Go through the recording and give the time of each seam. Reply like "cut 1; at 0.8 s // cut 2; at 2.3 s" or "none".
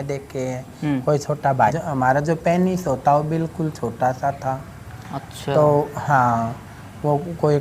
cut 1; at 1.8 s